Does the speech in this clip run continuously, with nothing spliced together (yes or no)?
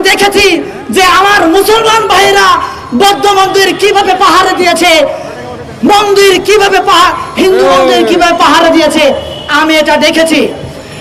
yes